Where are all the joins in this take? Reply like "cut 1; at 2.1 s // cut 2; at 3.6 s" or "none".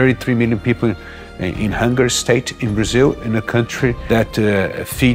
cut 1; at 4.0 s